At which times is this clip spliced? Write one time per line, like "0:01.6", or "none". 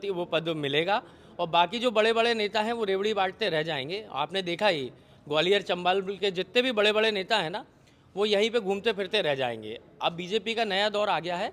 none